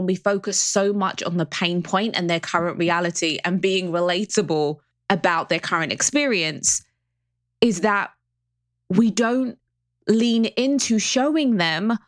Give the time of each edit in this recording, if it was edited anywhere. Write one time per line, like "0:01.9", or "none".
0:04.9